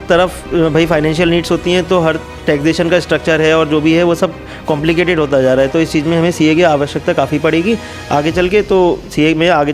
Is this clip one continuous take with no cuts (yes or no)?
yes